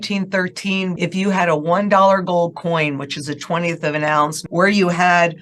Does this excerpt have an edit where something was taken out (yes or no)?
yes